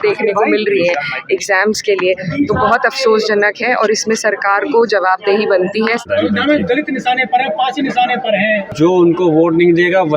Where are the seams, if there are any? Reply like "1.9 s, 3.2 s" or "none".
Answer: 6.1 s, 8.7 s